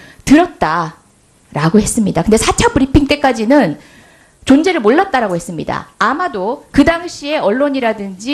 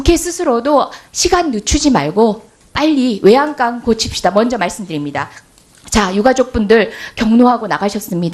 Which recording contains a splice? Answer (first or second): second